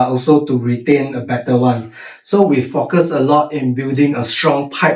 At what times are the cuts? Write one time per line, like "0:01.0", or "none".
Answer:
none